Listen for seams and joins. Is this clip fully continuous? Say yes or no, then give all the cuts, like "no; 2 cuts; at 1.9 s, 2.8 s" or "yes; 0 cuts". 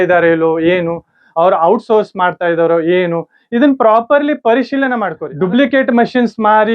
yes; 0 cuts